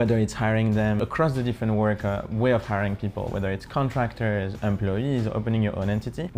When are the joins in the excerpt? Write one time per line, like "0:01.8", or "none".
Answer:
0:01.0